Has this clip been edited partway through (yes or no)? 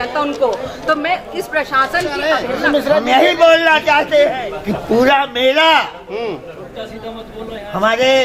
yes